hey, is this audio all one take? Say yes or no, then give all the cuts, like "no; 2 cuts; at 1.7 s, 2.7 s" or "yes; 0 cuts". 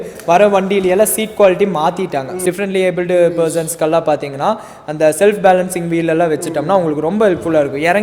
no; 1 cut; at 2.3 s